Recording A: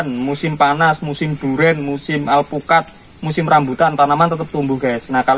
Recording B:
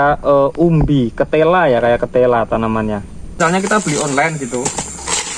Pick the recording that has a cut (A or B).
B